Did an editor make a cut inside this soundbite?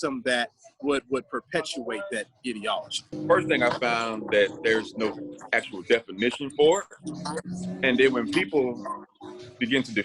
yes; 1 cut; at 3.1 s

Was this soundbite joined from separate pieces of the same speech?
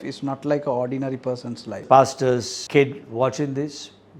yes; 2 cuts; at 1.8 s, 2.6 s

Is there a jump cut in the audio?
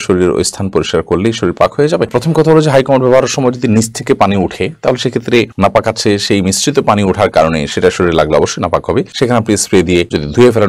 no; 0 cuts

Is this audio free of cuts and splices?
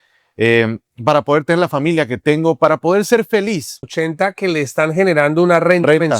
no; 1 cut; at 3.8 s

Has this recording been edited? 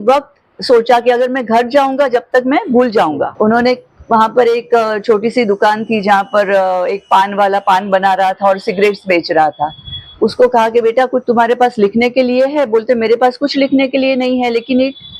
yes; 1 cut; at 3.3 s

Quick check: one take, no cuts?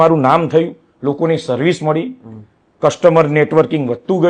yes; 0 cuts

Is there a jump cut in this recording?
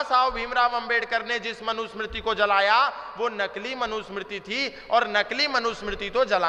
no; 0 cuts

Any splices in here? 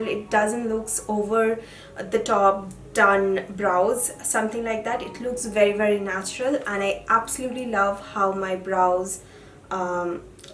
no; 0 cuts

